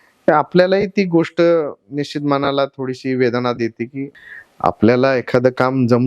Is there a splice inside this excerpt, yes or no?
yes